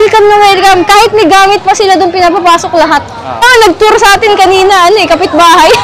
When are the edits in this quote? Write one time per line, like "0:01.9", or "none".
0:03.4